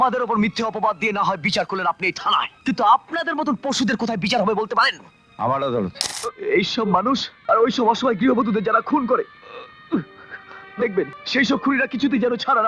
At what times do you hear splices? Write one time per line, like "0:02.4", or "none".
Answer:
0:02.5
0:06.1
0:07.3
0:11.2